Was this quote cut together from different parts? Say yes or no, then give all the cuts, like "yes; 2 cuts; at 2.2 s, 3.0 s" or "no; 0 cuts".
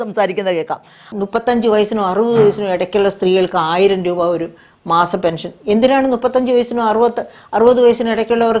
yes; 1 cut; at 1.1 s